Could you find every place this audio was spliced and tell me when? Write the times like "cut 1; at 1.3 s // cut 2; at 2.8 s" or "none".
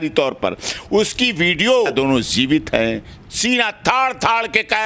cut 1; at 1.9 s